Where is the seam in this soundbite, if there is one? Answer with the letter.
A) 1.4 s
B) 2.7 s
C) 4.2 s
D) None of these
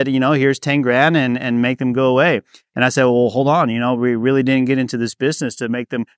D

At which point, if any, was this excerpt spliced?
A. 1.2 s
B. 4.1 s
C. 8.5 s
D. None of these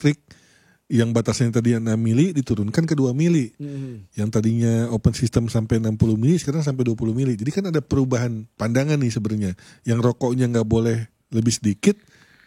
C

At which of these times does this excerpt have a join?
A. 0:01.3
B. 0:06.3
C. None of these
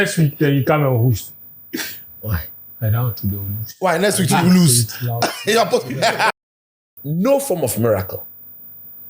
B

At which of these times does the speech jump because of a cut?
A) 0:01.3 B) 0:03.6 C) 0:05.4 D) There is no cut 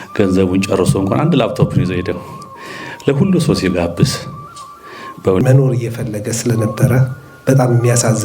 C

